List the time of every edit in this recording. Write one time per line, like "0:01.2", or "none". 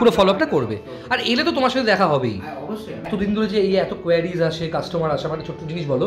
0:03.1